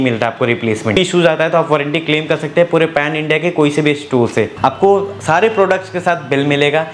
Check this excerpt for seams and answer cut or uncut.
cut